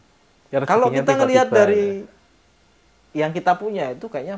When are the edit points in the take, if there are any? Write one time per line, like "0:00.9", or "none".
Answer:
none

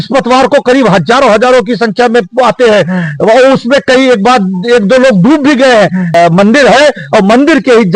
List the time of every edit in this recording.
0:06.1

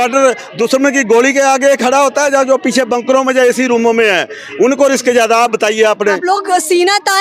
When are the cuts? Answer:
none

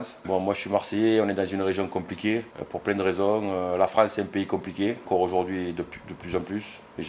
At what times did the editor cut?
none

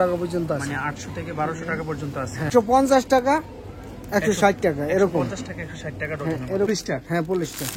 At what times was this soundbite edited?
0:02.5
0:06.7

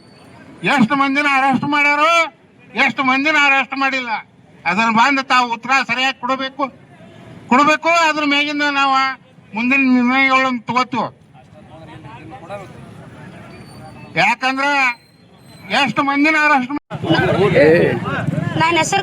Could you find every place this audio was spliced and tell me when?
0:16.8

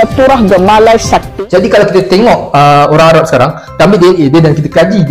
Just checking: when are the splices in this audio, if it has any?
0:01.3

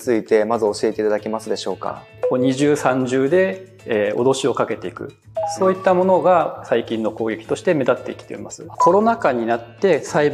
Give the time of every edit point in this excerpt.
0:02.1
0:08.7

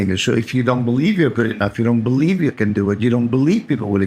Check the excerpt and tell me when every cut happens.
none

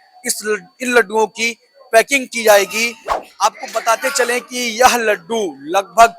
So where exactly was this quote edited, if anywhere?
0:03.2

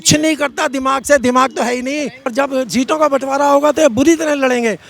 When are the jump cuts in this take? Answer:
0:02.2

